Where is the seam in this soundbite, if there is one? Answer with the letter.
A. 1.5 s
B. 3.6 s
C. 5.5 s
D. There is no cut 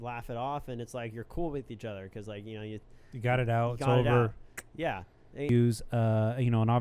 C